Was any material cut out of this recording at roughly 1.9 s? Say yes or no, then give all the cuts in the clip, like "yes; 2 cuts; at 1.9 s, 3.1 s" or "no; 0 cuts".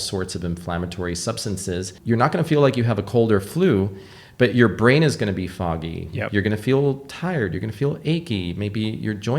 yes; 1 cut; at 1.9 s